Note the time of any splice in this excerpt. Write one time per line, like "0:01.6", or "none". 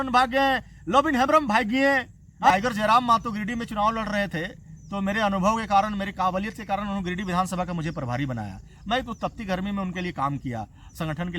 0:02.5